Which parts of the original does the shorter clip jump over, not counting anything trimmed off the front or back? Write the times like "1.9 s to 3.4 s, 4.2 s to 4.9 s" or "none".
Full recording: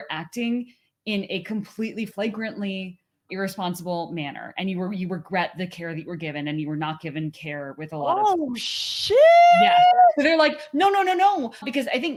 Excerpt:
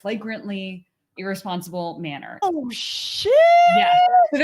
4.6 s to 8.3 s